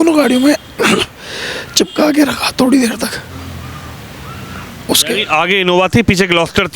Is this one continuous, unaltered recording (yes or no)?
yes